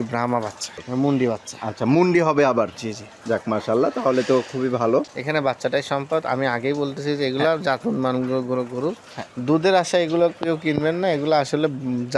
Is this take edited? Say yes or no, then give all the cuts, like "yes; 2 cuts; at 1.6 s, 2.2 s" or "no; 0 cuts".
yes; 2 cuts; at 0.8 s, 5.2 s